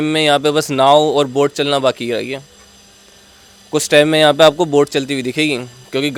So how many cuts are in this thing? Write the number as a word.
zero